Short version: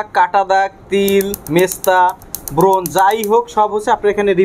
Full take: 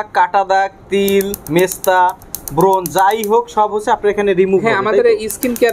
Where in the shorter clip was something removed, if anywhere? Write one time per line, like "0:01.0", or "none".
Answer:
none